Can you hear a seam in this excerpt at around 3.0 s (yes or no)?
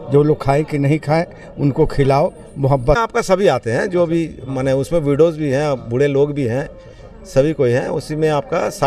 yes